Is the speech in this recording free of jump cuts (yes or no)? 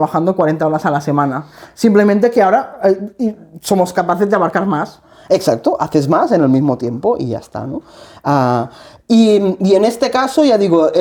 yes